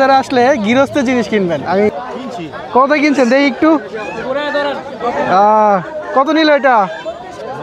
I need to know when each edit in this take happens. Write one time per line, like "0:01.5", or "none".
0:01.9